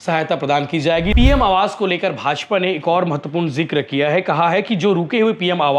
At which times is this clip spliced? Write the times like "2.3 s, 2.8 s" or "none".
1.1 s